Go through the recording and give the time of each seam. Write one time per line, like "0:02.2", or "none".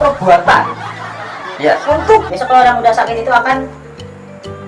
0:02.3